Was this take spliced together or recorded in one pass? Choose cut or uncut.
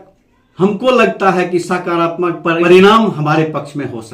cut